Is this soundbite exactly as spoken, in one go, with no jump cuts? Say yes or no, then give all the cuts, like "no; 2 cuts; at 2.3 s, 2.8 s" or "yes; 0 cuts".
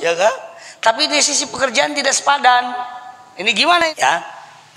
no; 1 cut; at 3.8 s